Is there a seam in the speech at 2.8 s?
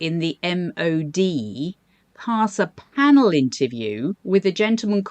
no; 1 cut; at 4.2 s

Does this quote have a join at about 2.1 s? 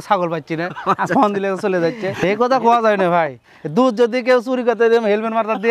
yes; 1 cut; at 2.1 s

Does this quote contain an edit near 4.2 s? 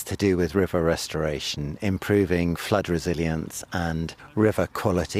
yes; 1 cut; at 4.2 s

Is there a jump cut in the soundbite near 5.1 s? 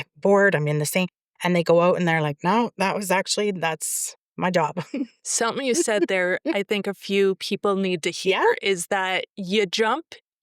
yes; 1 cut; at 5.1 s

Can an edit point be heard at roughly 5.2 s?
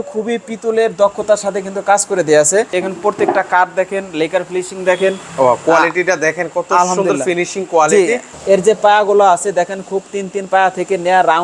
no; 2 cuts; at 2.8 s, 8.3 s

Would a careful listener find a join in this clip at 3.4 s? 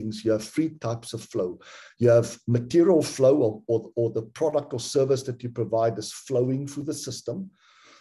no; 0 cuts

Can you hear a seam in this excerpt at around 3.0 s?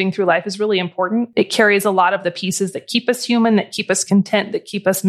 no; 1 cut; at 1.3 s

